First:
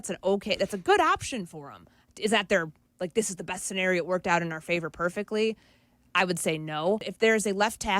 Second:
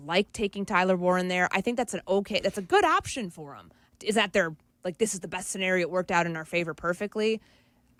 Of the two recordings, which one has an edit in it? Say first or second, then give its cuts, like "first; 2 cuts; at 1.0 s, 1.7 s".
first; 1 cut; at 7.1 s